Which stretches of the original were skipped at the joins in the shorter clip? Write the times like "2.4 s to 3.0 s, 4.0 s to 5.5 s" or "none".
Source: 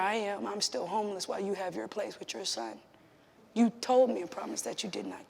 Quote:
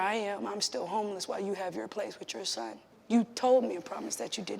2.9 s to 3.3 s